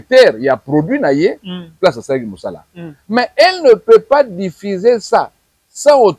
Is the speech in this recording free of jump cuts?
yes; 0 cuts

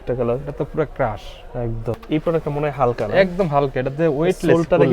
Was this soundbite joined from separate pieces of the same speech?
yes; 1 cut; at 2.0 s

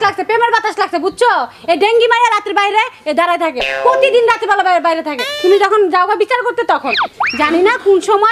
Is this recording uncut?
yes; 0 cuts

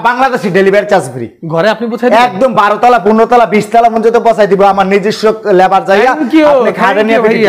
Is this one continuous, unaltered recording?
yes; 0 cuts

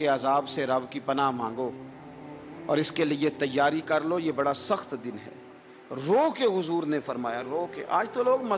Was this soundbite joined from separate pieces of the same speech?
no; 0 cuts

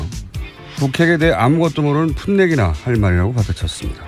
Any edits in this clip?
yes; 1 cut; at 2.4 s

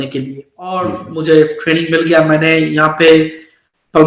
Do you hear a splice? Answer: yes; 1 cut; at 0.9 s

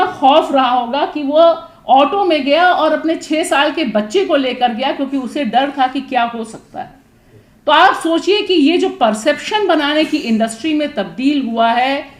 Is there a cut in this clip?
no; 0 cuts

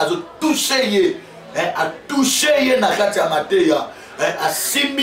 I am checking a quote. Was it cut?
no; 0 cuts

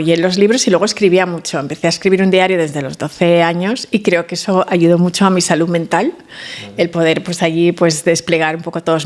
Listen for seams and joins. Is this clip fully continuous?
yes; 0 cuts

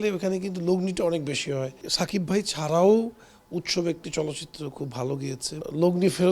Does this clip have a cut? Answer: yes; 2 cuts; at 1.9 s, 5.6 s

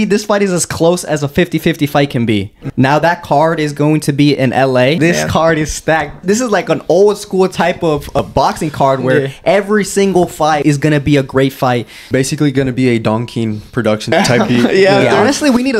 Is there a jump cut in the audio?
yes; 7 cuts; at 2.6 s, 5.0 s, 6.2 s, 8.2 s, 10.6 s, 12.1 s, 14.1 s

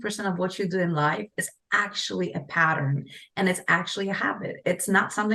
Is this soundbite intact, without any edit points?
yes; 0 cuts

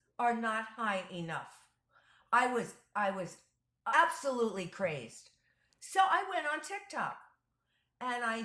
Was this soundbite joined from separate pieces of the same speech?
yes; 1 cut; at 3.7 s

